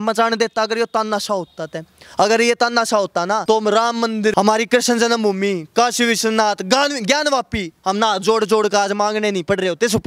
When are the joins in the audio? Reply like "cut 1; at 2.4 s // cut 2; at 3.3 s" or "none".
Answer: cut 1; at 2.0 s // cut 2; at 3.4 s // cut 3; at 4.3 s